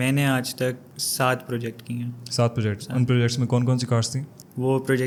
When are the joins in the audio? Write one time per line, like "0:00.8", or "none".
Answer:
none